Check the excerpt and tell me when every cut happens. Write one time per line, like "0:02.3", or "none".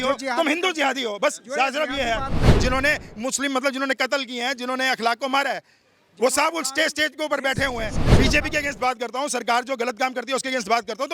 0:02.5
0:08.1